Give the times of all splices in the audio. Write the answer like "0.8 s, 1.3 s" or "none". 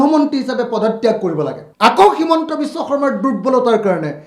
1.6 s